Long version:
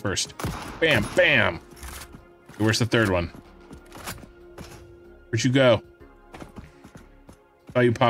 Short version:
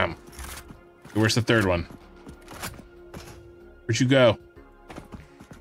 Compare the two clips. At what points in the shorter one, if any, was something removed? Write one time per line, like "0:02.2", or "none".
none